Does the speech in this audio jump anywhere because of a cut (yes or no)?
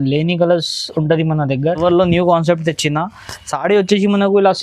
yes